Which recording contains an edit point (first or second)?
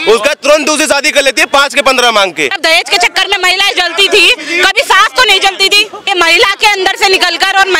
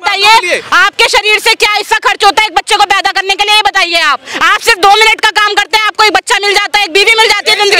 first